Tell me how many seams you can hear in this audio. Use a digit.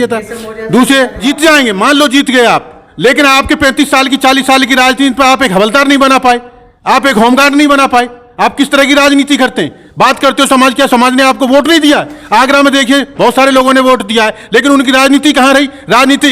1